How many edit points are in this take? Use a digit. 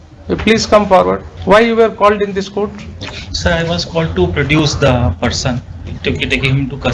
1